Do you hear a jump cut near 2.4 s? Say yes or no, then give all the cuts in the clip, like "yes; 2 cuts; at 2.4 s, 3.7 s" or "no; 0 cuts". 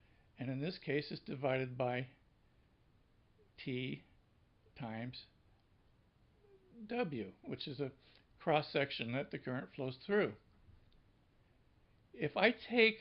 yes; 1 cut; at 2.4 s